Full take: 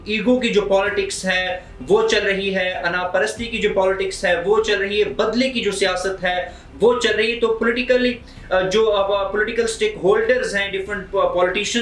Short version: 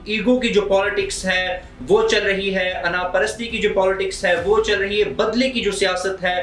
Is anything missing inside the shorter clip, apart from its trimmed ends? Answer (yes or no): no